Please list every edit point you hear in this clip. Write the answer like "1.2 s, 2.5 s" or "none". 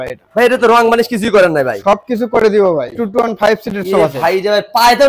2.9 s

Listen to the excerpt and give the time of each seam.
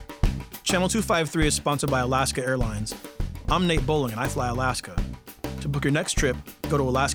none

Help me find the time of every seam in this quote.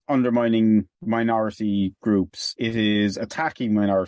2.7 s

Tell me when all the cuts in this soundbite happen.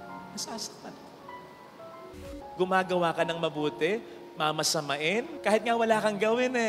2.4 s, 5.3 s

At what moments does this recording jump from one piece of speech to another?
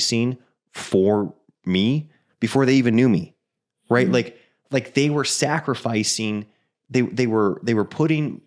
none

